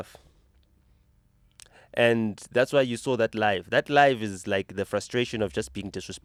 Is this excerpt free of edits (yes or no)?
yes